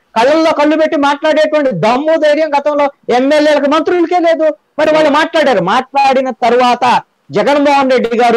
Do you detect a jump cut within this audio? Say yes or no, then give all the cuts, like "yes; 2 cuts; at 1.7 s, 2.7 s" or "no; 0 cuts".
no; 0 cuts